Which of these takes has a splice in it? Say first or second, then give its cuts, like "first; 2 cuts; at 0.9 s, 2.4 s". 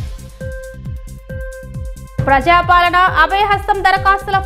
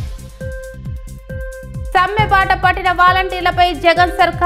first; 1 cut; at 1.9 s